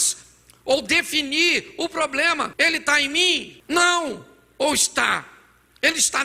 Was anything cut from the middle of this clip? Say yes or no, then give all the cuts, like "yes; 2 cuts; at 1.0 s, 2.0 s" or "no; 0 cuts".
yes; 2 cuts; at 2.5 s, 3.5 s